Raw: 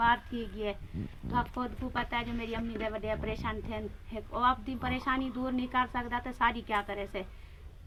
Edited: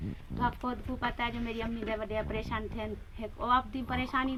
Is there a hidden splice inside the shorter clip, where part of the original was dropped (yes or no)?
no